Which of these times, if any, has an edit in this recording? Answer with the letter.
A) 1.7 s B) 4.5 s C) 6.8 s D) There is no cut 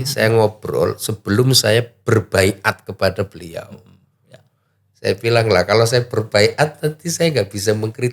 D